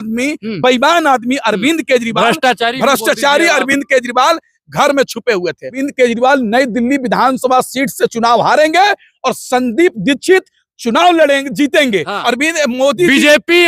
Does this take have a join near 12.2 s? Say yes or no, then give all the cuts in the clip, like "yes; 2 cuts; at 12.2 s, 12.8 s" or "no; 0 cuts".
yes; 2 cuts; at 5.8 s, 12.2 s